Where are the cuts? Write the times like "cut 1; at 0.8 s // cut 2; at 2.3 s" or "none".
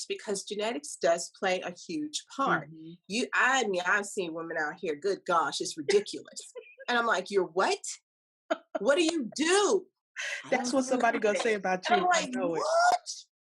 none